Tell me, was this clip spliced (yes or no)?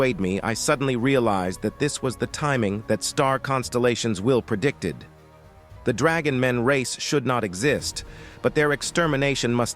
no